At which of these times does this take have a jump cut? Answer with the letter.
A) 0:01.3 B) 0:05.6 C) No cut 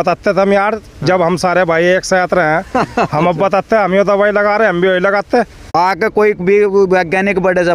B